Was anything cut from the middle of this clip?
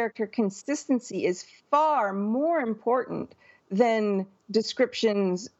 no; 0 cuts

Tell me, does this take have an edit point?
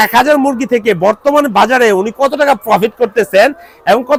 no; 0 cuts

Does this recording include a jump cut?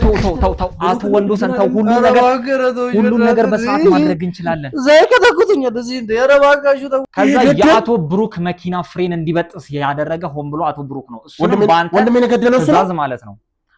yes; 1 cut; at 7.1 s

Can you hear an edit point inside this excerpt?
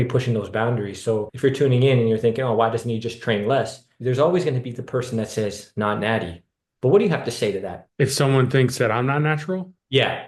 yes; 2 cuts; at 3.8 s, 7.8 s

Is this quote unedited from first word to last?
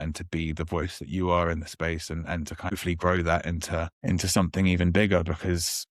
no; 2 cuts; at 2.7 s, 3.9 s

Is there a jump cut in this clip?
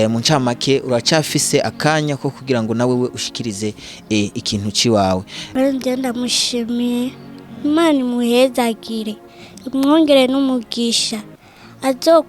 yes; 1 cut; at 5.4 s

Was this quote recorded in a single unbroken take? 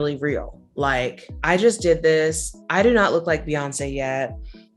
yes; 0 cuts

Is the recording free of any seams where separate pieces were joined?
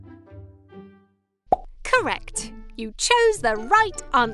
no; 1 cut; at 1.5 s

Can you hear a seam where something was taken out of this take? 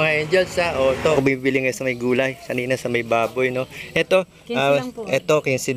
yes; 1 cut; at 1.2 s

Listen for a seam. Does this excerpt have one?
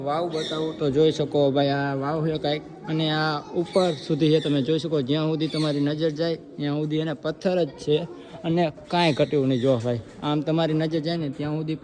no; 0 cuts

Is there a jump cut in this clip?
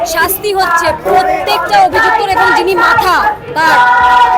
no; 0 cuts

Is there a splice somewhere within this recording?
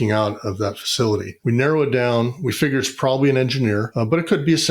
no; 0 cuts

